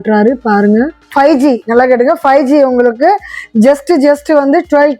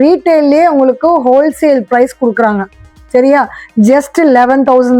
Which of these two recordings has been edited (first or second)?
first